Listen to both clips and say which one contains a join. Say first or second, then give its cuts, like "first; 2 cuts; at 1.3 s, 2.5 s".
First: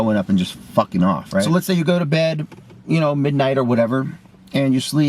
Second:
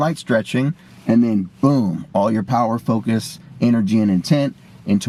first; 1 cut; at 1.5 s